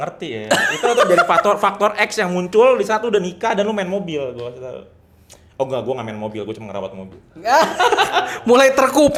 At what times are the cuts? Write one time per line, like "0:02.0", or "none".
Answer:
none